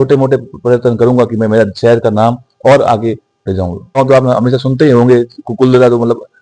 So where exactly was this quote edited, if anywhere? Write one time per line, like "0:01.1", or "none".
0:04.0